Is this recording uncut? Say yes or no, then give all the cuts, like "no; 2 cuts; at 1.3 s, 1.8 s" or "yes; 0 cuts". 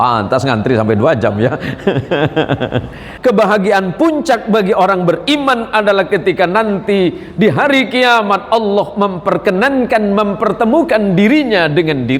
no; 1 cut; at 3.1 s